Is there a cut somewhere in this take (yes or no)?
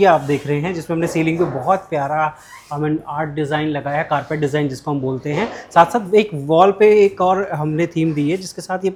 no